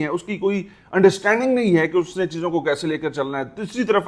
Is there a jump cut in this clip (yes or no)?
no